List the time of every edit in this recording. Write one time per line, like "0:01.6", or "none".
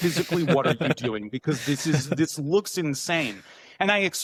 none